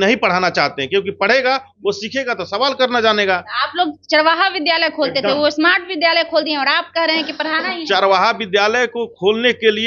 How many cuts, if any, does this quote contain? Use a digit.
0